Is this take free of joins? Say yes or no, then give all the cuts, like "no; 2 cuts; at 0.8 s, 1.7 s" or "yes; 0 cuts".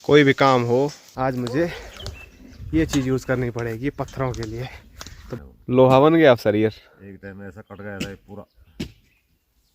no; 2 cuts; at 1.0 s, 5.4 s